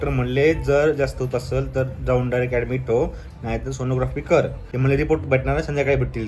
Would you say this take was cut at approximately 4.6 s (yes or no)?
yes